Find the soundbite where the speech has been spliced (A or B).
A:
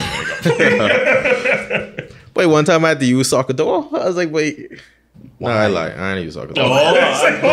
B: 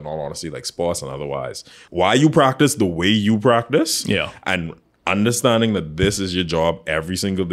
B